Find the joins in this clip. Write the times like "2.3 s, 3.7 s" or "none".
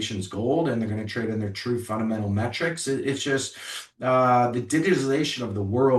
none